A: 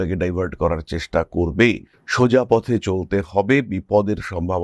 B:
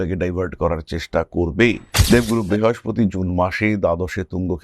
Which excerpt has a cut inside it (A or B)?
B